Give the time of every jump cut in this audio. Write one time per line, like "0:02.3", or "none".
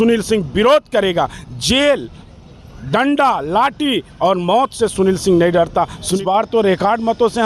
0:06.2